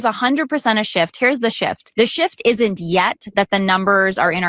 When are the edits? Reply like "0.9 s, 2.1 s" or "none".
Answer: 1.8 s